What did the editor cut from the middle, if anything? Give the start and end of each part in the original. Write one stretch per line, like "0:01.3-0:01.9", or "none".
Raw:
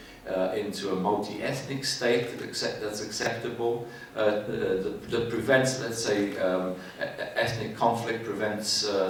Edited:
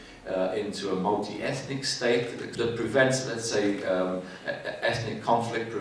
0:02.5-0:05.0